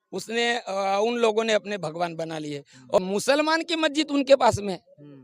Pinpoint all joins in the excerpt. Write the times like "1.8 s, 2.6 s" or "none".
3.0 s